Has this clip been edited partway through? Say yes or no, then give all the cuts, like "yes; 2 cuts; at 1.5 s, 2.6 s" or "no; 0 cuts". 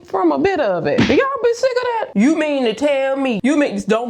yes; 2 cuts; at 2.0 s, 3.4 s